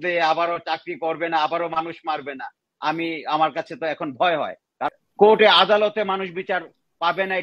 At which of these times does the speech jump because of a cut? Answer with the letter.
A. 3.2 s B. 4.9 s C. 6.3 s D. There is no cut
B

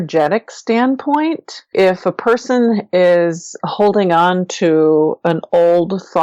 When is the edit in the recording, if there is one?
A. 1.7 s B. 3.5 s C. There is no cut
A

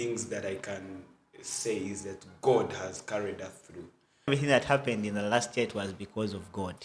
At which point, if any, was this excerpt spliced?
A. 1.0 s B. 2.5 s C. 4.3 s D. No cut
C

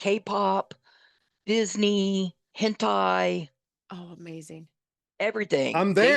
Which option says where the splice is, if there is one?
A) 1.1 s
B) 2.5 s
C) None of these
B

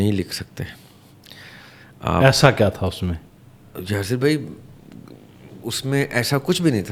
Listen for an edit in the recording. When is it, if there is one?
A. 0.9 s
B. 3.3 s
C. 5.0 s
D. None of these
D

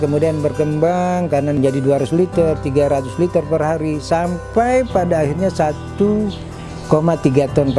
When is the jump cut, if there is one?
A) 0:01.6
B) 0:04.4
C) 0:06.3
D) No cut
A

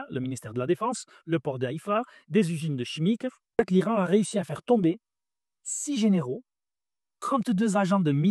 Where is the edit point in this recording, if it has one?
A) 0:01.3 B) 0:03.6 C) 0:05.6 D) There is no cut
B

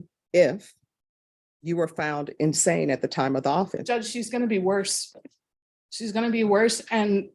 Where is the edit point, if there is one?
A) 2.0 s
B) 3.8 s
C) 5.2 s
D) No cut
B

